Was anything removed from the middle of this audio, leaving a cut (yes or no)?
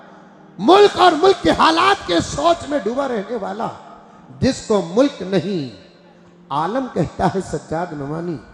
no